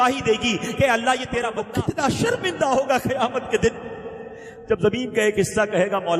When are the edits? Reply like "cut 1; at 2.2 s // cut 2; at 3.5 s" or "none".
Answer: cut 1; at 1.6 s

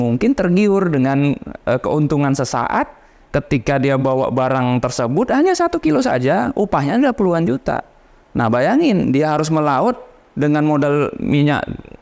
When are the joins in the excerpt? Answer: none

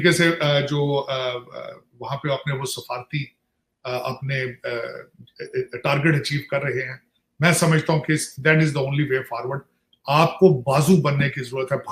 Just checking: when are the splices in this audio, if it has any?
none

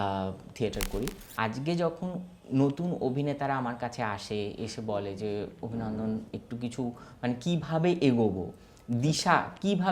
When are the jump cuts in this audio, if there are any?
cut 1; at 1.2 s

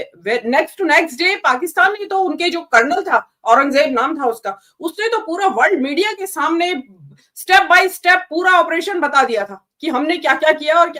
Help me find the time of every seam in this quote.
none

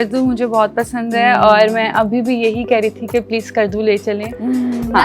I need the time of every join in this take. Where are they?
none

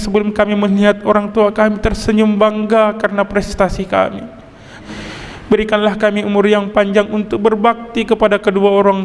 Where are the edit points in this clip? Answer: cut 1; at 4.7 s

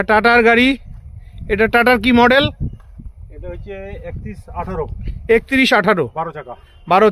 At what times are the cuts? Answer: none

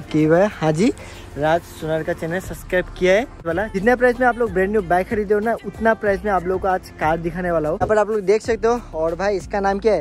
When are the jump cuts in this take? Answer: cut 1; at 3.4 s // cut 2; at 7.8 s

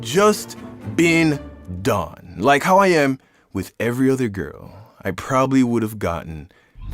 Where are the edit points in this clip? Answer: none

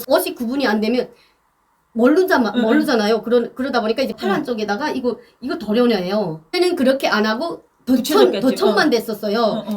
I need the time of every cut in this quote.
cut 1; at 4.2 s // cut 2; at 6.5 s

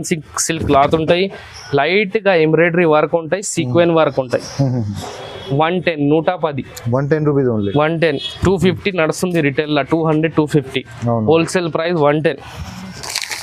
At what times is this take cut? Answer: none

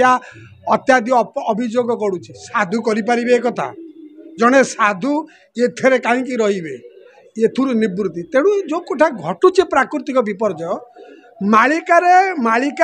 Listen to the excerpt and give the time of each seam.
none

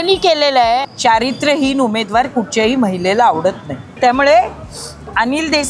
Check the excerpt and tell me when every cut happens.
cut 1; at 0.9 s // cut 2; at 3.9 s

